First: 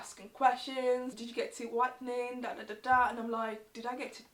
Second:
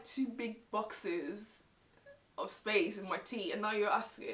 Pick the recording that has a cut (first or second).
first